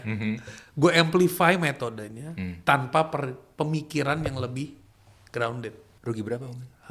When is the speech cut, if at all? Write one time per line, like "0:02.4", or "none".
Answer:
0:05.8